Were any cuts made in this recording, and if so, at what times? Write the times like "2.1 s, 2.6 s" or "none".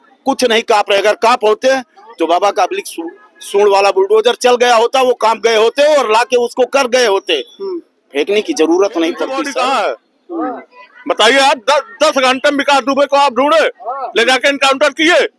9.4 s